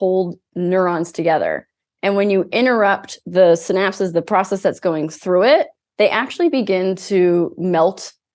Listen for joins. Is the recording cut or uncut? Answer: uncut